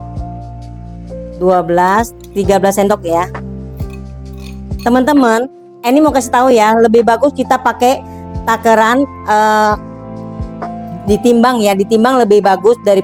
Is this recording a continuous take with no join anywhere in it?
yes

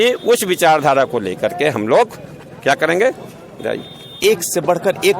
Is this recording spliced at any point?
yes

